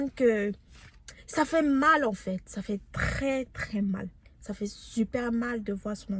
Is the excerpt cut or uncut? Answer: uncut